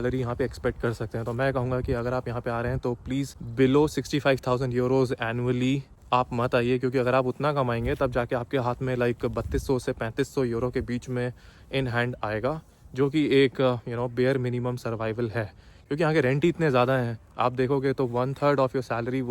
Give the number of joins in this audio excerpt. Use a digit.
2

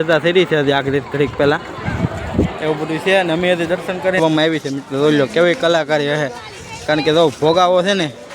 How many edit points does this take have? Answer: 1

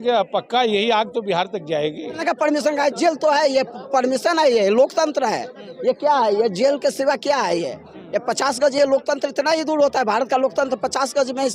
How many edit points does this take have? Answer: 1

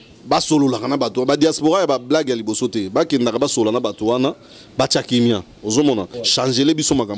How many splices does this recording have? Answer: 1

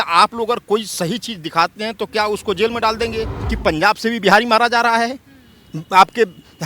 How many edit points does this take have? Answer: 1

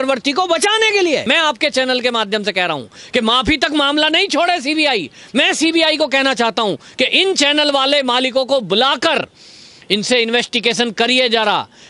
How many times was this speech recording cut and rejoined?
1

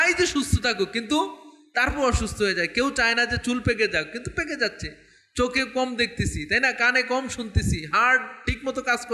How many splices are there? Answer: 0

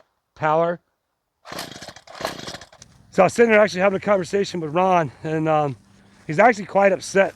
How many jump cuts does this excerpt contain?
1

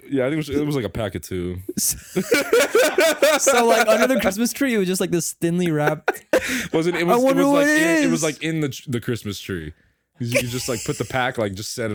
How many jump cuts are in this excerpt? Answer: 0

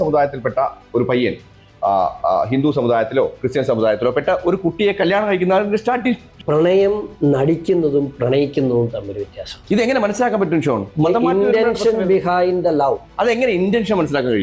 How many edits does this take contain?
2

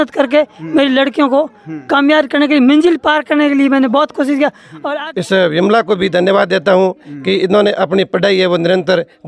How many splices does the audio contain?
1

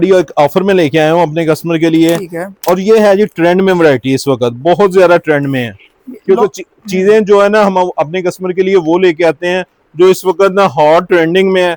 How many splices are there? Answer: 0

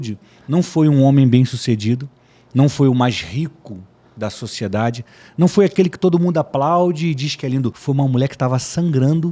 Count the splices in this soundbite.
1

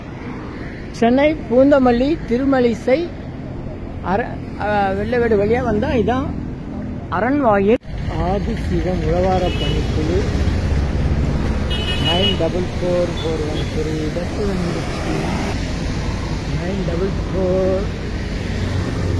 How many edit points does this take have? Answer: 2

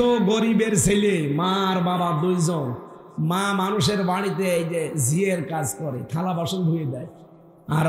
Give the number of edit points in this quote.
0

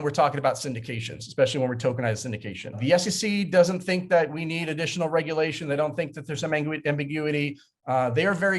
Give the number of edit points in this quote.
1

